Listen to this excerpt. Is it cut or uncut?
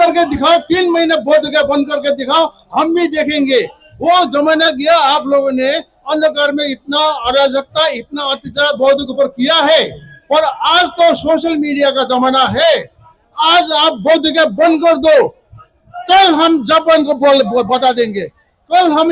uncut